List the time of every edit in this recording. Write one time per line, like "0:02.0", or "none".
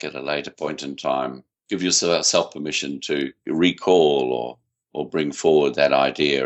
0:01.5
0:03.5